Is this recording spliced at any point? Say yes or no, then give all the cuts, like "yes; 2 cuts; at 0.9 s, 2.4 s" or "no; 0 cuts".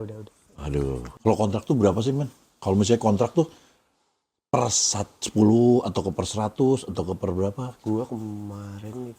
yes; 1 cut; at 1.0 s